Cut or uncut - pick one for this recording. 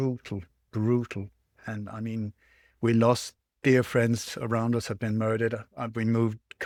uncut